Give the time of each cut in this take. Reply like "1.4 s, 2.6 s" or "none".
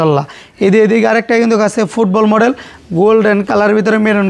none